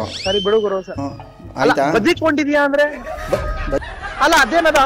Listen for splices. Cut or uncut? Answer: cut